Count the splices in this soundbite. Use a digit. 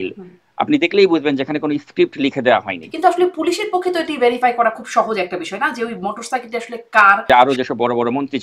2